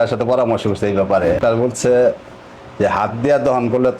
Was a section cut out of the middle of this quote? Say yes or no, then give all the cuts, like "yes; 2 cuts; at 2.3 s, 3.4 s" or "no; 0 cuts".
yes; 1 cut; at 1.4 s